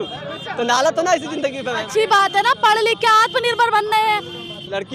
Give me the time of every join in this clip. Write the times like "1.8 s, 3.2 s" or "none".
none